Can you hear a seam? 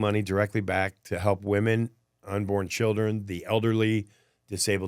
no; 0 cuts

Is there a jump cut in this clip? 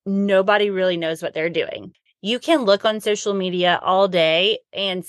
yes; 1 cut; at 1.9 s

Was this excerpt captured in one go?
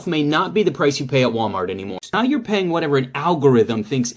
no; 1 cut; at 2.0 s

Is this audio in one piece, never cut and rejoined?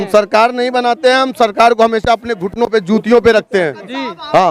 yes; 0 cuts

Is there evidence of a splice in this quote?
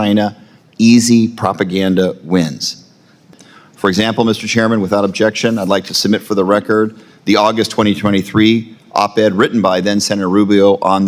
yes; 1 cut; at 3.2 s

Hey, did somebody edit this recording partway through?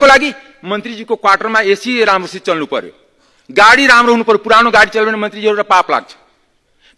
no; 0 cuts

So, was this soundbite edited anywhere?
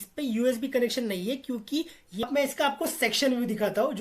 yes; 1 cut; at 2.0 s

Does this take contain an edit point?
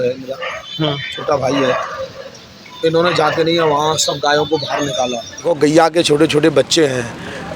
yes; 1 cut; at 5.4 s

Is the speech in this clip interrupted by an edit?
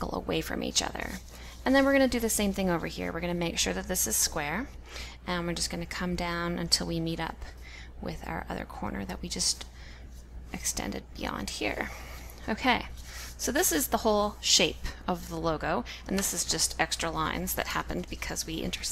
yes; 1 cut; at 11.3 s

